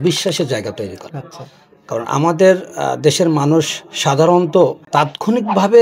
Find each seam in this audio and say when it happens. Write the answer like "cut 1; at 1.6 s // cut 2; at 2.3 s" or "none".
cut 1; at 4.8 s